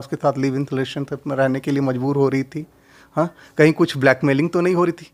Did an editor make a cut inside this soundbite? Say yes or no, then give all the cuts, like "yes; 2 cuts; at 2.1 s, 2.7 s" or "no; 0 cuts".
no; 0 cuts